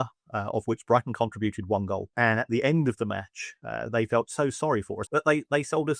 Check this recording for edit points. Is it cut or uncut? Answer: cut